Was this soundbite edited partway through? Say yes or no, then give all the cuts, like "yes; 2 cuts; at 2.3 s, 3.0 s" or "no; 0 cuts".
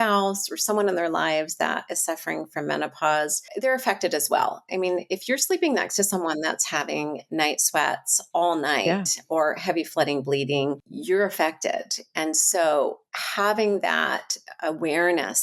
yes; 2 cuts; at 3.5 s, 10.9 s